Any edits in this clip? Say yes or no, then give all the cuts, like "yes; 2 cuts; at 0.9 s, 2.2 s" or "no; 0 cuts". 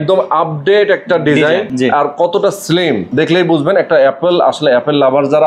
yes; 2 cuts; at 1.7 s, 3.1 s